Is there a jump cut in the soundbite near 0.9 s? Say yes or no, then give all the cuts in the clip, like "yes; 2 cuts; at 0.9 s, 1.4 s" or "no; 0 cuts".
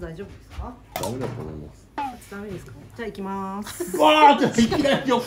yes; 1 cut; at 0.9 s